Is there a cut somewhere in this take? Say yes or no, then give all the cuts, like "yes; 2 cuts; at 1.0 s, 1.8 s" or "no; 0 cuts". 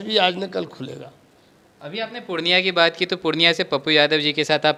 no; 0 cuts